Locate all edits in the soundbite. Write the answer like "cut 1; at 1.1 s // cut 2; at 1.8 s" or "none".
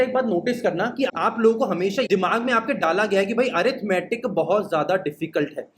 cut 1; at 1.1 s